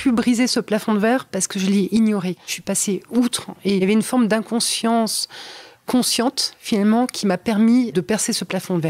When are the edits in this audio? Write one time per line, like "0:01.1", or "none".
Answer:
0:02.5
0:03.5
0:07.9